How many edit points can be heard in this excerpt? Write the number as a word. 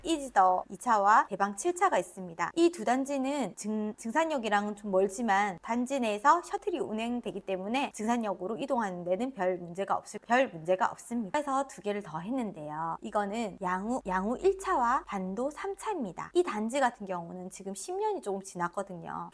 one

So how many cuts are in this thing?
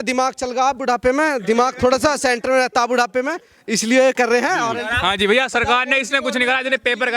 one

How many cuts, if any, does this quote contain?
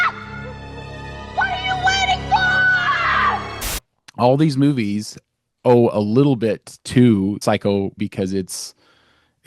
two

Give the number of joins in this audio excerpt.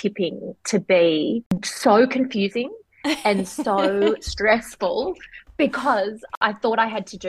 two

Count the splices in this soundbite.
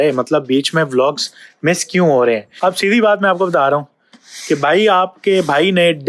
one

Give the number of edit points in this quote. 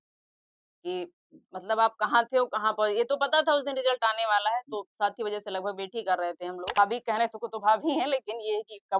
one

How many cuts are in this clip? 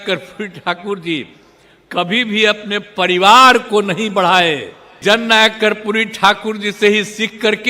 one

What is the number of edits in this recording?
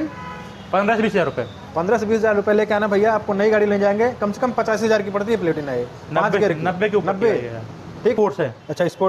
one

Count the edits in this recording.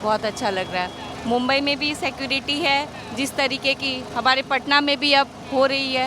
one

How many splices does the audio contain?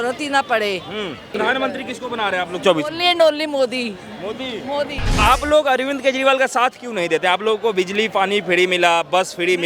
two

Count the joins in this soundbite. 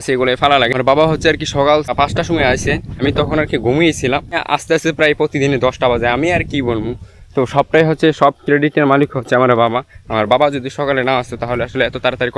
four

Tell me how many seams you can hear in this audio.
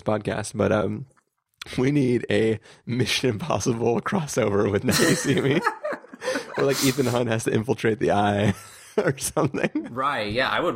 one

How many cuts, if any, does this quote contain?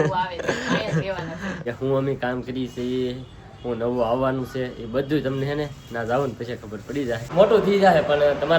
two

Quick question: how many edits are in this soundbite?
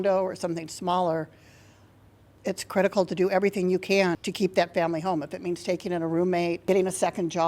three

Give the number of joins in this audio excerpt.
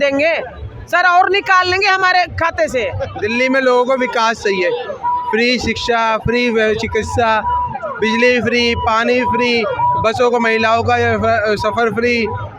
one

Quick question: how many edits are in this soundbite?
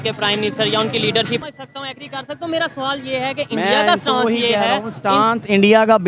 one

